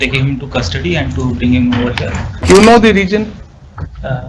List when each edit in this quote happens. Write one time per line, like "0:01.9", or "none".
0:02.4